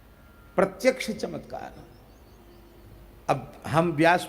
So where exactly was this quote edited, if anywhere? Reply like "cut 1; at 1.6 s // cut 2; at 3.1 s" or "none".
cut 1; at 3.0 s